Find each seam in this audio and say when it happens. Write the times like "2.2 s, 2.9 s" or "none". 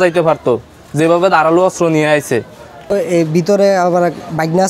2.9 s